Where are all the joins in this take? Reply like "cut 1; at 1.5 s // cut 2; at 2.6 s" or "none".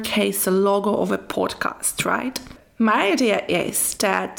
cut 1; at 2.6 s